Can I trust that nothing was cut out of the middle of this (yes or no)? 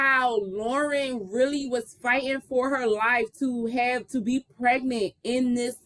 yes